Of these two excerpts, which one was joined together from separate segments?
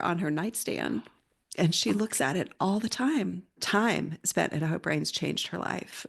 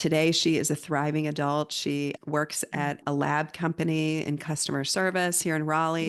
first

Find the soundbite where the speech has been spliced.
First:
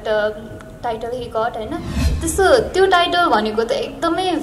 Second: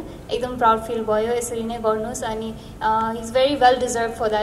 first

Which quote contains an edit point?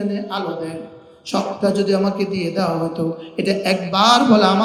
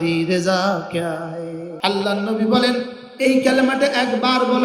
second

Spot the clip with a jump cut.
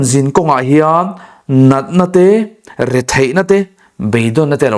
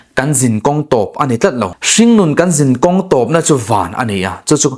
second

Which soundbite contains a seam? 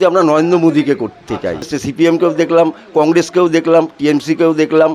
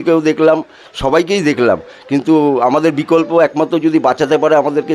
first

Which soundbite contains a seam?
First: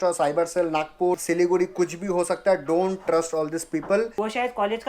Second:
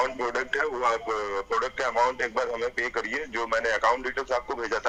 first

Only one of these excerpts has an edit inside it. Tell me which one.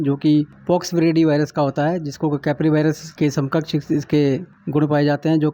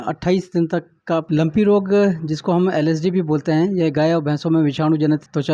second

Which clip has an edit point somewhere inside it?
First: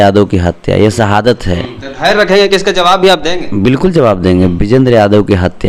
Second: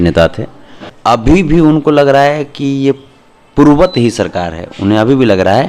second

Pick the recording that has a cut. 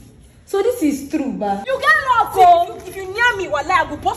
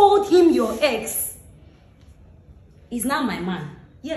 first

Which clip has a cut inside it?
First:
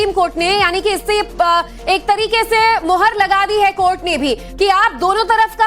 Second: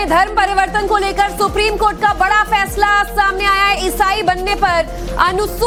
first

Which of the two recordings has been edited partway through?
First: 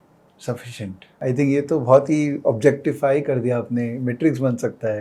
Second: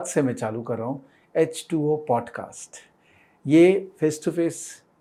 first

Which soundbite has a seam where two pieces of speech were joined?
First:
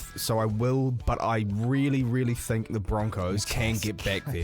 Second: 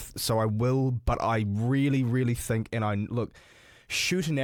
first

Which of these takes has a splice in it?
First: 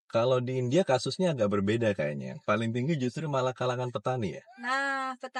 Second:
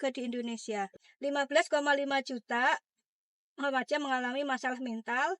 second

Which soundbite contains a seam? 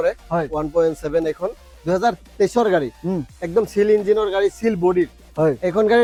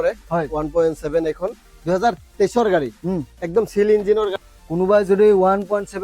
second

